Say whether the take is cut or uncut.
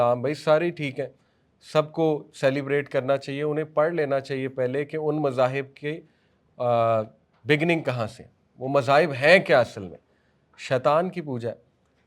uncut